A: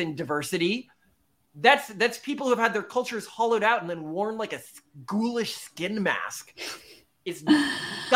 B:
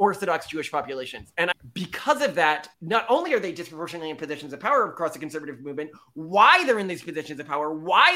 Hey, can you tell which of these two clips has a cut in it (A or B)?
B